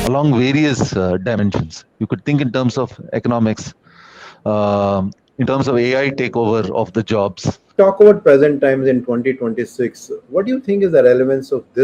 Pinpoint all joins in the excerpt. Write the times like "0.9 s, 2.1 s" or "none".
7.8 s

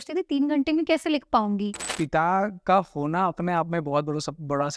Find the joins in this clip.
1.8 s

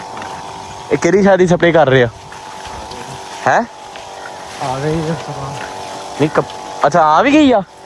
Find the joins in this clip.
none

